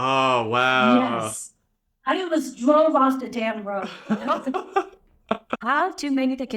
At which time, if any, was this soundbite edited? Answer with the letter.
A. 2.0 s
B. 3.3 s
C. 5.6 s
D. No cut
C